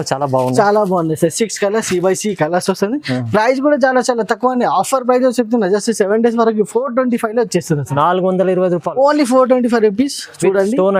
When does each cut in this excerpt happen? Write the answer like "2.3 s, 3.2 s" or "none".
none